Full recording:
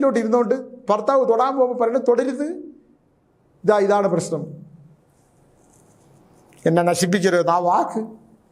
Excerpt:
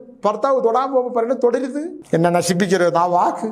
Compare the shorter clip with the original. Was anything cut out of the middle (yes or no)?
yes